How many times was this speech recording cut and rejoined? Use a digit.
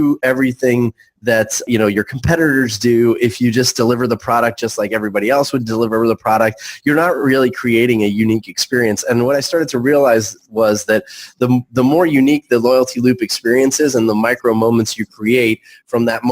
1